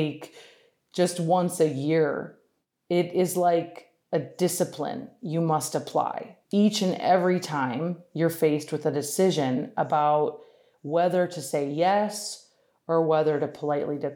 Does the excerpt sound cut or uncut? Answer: cut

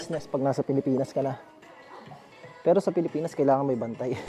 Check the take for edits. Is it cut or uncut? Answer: uncut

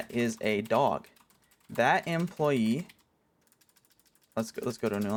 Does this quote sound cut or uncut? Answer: uncut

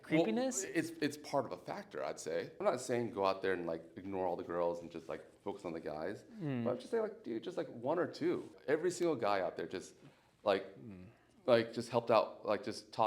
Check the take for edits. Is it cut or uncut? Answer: cut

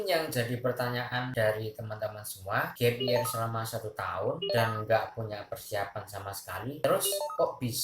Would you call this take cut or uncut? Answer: cut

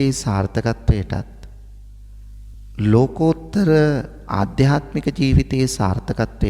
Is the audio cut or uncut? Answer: uncut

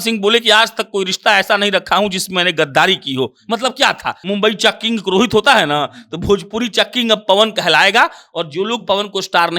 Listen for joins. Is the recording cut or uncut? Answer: cut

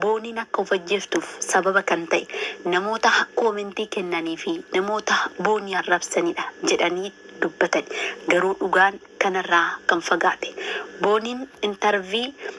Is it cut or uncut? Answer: uncut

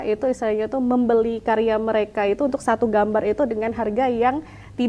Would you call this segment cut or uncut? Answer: uncut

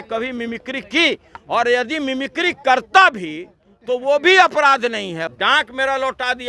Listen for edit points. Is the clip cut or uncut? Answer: cut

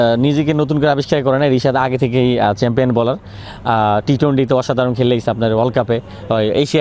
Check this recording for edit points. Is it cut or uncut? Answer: uncut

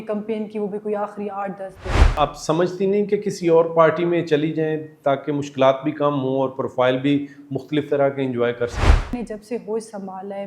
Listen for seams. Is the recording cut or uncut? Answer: cut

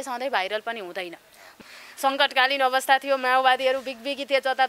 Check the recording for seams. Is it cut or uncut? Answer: cut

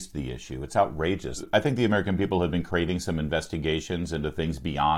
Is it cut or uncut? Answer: cut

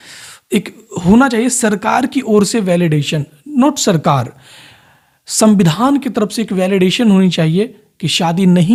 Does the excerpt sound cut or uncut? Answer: uncut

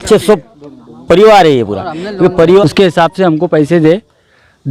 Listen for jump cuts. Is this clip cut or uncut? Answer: cut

